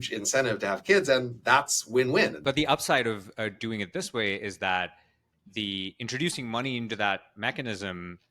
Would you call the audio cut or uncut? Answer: cut